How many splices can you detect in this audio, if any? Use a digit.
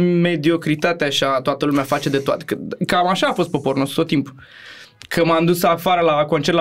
0